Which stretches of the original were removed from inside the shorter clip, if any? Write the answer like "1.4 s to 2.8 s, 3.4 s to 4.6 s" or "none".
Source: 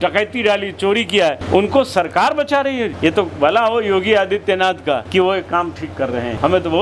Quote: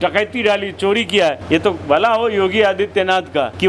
1.4 s to 2.9 s